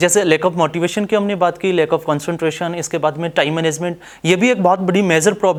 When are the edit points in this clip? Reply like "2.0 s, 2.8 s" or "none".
none